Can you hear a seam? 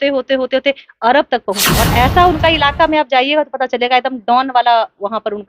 yes; 1 cut; at 1.6 s

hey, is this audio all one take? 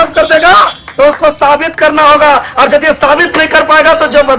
yes; 0 cuts

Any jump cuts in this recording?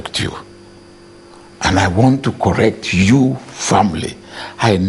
no; 0 cuts

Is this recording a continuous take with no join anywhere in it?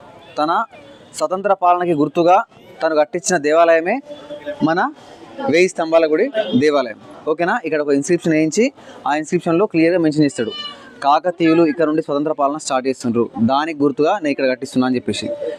yes; 0 cuts

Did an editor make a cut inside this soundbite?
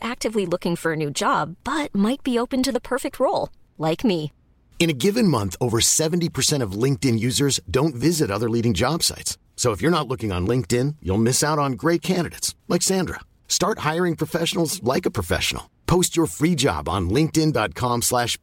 no; 0 cuts

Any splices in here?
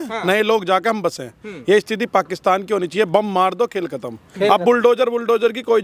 no; 0 cuts

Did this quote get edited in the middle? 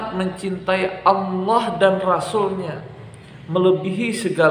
no; 0 cuts

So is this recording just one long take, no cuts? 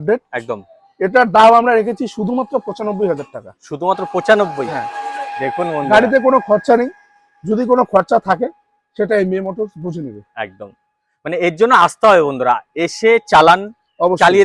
yes; 0 cuts

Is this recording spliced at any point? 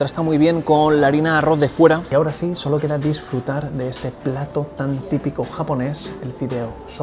yes; 1 cut; at 2.0 s

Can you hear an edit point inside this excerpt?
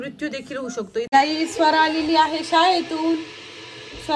yes; 1 cut; at 1.1 s

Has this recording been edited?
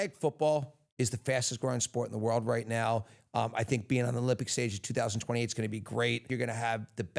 yes; 1 cut; at 6.3 s

